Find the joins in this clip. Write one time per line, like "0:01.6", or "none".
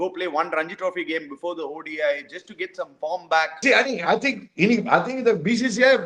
0:03.6